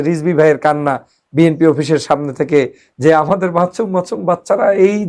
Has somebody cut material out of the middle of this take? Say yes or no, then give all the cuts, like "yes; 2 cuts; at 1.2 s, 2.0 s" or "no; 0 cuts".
no; 0 cuts